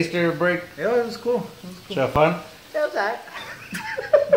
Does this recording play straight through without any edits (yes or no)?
no